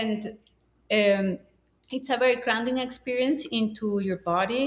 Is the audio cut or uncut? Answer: uncut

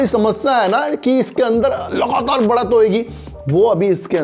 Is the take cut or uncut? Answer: uncut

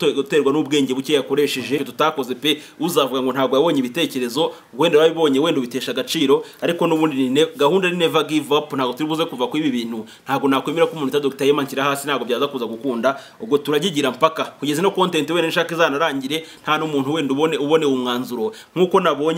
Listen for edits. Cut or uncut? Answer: cut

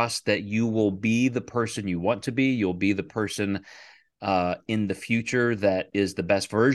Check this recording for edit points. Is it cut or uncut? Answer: uncut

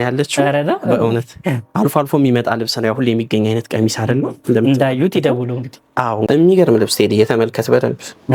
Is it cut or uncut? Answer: cut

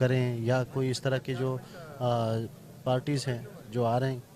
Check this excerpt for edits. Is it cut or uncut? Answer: uncut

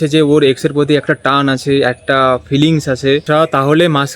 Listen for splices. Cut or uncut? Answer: cut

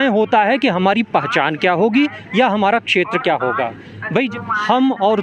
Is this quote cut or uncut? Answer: cut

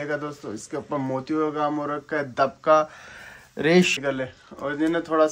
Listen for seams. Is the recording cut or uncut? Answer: cut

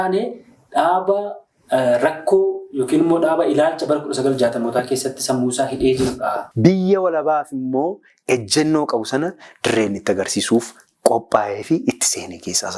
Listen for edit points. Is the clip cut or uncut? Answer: cut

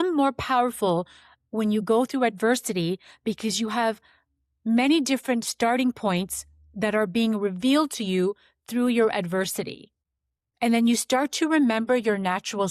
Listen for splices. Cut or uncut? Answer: uncut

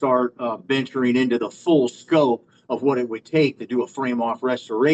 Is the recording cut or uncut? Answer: uncut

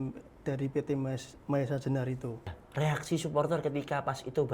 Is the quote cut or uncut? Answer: cut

